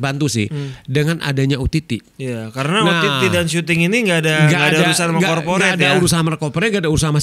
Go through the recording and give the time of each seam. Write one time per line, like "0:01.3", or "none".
0:02.1